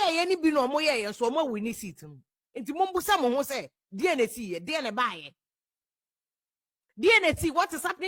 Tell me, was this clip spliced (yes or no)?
no